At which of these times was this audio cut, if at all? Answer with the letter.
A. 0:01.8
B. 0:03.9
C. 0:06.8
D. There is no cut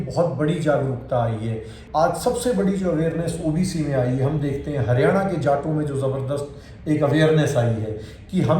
A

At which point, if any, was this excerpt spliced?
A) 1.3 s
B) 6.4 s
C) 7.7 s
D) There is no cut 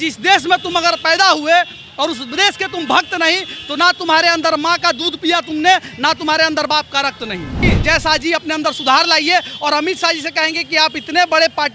C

